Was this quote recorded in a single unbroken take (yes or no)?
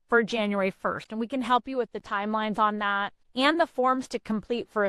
no